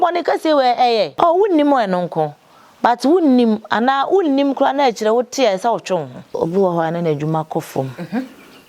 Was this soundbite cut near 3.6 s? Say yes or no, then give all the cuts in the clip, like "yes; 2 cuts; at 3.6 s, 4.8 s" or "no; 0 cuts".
no; 2 cuts; at 1.1 s, 6.4 s